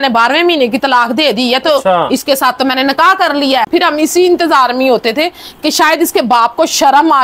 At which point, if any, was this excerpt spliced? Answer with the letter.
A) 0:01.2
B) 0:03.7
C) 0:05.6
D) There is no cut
B